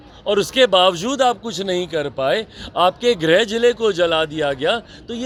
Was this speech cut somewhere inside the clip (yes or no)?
no